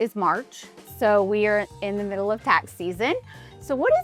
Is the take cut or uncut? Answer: uncut